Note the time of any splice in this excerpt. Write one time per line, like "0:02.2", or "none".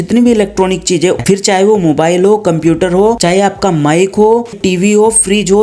0:01.2
0:03.2
0:04.6